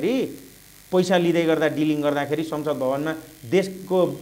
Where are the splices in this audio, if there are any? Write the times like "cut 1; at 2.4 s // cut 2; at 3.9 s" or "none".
none